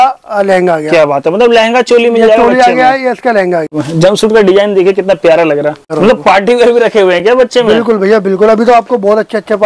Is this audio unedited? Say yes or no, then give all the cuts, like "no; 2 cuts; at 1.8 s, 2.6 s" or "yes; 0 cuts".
no; 2 cuts; at 3.8 s, 5.9 s